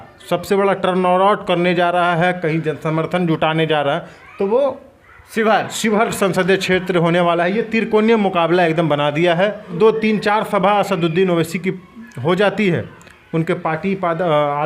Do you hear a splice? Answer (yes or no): yes